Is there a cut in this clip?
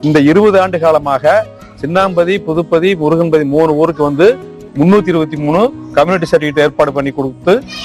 no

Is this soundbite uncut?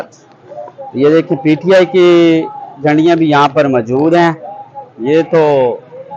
yes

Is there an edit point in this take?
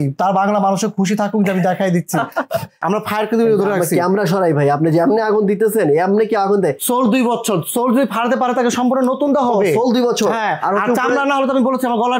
yes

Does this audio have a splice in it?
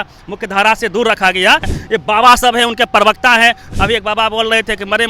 yes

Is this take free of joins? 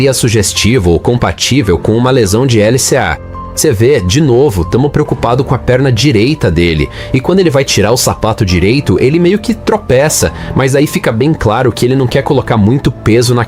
no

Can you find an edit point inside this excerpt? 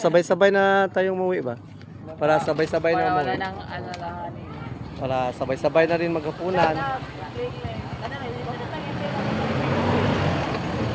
no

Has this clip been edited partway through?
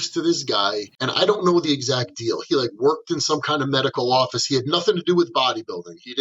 yes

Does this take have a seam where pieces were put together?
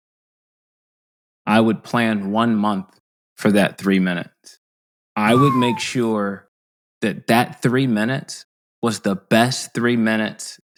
no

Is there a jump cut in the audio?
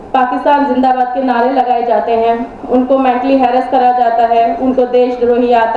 no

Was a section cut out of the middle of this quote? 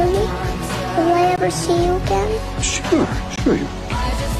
no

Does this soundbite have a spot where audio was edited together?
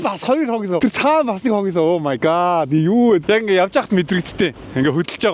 yes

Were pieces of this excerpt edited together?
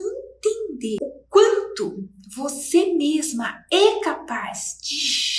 yes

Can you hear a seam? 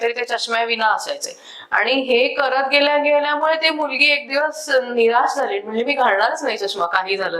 no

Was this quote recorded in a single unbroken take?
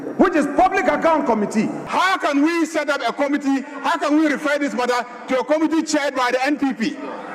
no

